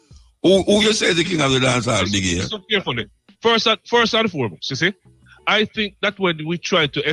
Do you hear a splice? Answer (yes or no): no